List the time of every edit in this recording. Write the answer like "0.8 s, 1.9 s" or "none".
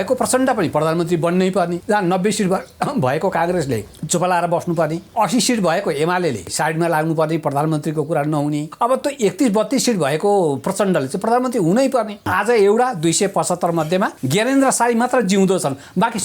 1.8 s, 3.9 s, 5.0 s, 6.5 s, 8.7 s, 12.2 s, 14.2 s

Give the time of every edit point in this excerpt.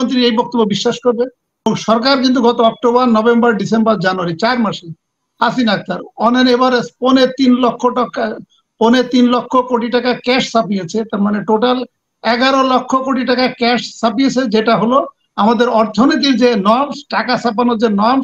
1.7 s

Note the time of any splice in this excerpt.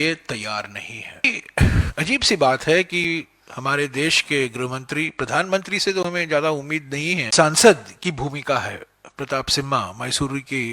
1.2 s, 7.3 s

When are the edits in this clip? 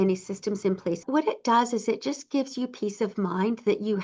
1.0 s

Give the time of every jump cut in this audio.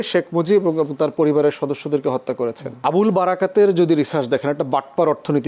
2.7 s

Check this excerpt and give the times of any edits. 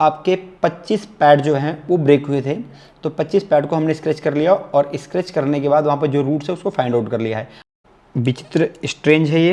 7.5 s

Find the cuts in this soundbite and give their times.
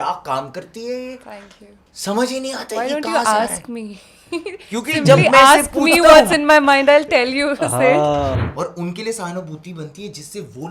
8.4 s

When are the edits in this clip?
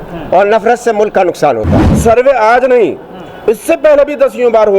1.8 s

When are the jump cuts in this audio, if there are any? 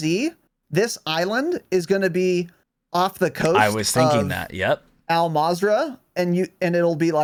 none

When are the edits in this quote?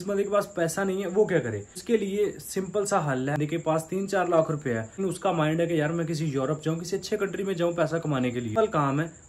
1.7 s, 3.4 s, 5.0 s, 8.6 s

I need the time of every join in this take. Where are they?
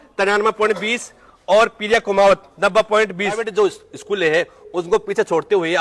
3.4 s

